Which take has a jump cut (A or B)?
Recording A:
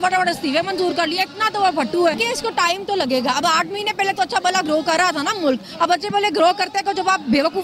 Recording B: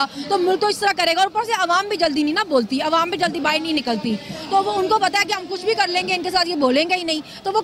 A